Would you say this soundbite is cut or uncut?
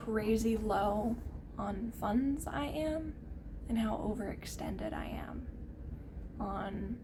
uncut